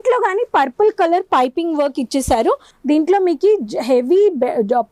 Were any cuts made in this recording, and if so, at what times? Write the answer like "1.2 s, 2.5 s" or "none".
2.7 s